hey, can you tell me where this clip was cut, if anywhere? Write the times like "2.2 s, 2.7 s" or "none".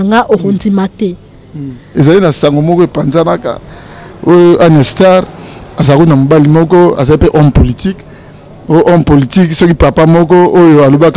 1.9 s